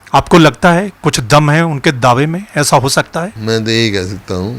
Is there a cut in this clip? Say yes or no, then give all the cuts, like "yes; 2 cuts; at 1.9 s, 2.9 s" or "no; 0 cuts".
yes; 1 cut; at 3.4 s